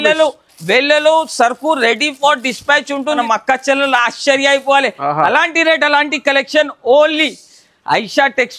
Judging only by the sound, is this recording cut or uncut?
cut